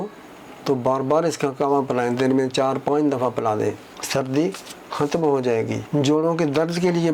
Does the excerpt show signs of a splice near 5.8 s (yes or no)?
yes